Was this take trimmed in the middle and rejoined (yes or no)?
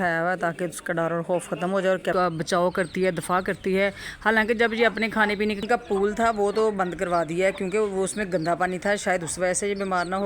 yes